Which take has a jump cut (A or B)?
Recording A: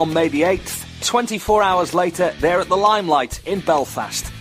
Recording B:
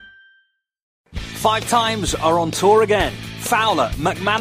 B